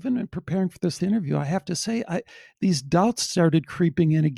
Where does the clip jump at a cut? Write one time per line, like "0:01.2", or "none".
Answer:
0:01.0